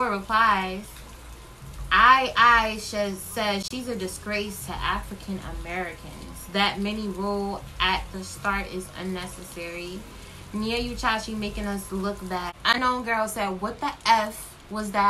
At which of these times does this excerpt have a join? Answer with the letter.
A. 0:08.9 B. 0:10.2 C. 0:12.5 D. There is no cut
C